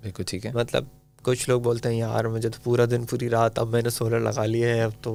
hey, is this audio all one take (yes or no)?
yes